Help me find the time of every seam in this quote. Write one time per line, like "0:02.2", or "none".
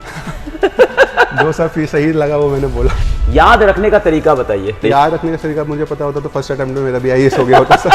0:03.0
0:04.8